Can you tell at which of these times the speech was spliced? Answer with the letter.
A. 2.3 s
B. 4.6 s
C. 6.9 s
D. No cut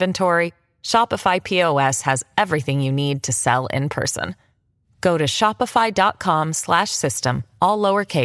D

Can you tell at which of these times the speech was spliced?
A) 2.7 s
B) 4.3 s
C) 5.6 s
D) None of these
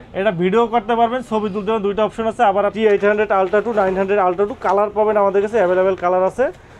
A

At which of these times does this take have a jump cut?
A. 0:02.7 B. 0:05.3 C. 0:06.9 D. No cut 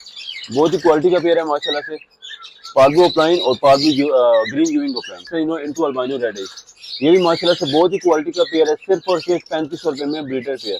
B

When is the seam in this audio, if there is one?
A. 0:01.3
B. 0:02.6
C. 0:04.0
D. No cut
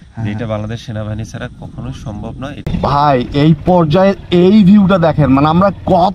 B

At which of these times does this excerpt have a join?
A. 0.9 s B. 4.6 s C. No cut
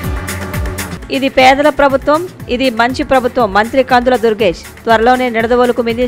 A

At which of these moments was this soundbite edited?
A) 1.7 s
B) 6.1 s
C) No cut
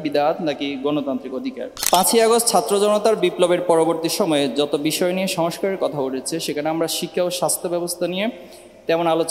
A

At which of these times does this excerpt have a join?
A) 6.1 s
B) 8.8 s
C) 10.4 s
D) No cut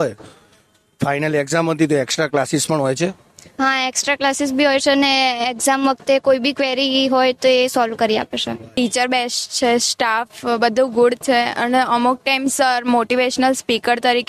B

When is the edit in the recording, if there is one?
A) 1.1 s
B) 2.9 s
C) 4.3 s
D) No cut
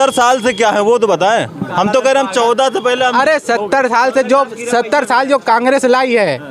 D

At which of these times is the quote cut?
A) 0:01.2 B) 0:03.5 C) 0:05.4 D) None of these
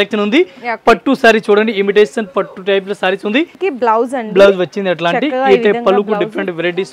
B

